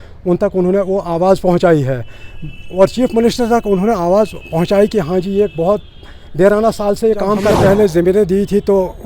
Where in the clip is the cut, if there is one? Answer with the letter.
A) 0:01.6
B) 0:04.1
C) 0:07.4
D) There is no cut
C